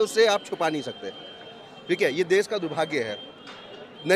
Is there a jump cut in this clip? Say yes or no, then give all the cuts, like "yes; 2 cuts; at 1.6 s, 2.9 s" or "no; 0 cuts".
no; 0 cuts